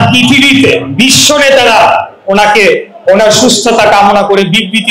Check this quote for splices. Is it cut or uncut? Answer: uncut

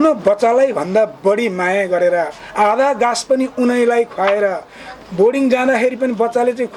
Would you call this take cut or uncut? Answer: uncut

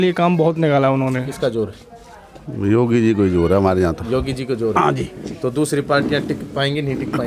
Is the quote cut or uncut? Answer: cut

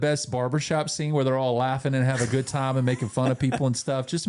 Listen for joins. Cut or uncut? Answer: uncut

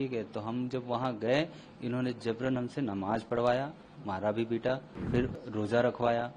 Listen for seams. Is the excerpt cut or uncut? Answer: cut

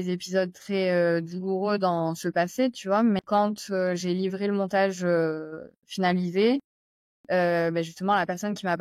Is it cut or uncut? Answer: cut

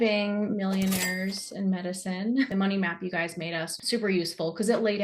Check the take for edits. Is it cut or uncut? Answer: cut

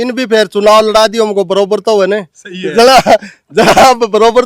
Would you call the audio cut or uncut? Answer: uncut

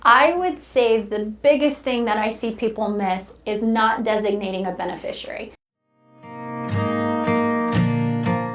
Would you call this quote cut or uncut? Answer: cut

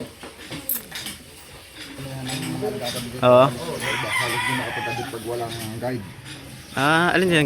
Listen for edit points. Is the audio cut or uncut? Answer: cut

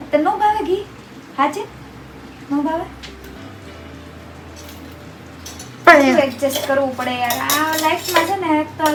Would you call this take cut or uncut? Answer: uncut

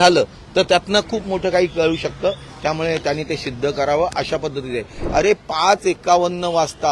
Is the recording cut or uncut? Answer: cut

